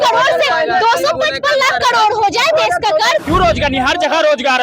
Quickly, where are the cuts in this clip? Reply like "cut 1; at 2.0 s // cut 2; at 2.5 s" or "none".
cut 1; at 3.2 s